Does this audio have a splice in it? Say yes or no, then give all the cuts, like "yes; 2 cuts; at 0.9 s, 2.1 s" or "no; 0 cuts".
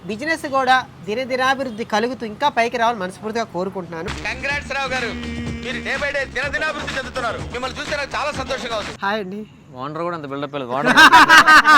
yes; 1 cut; at 8.9 s